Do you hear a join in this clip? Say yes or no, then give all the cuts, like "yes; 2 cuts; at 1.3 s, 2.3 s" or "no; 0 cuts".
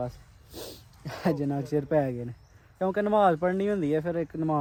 no; 0 cuts